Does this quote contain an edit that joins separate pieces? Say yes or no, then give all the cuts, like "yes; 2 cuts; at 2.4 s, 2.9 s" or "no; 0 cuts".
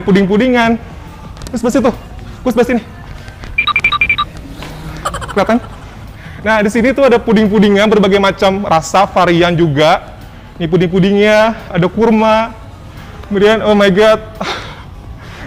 no; 0 cuts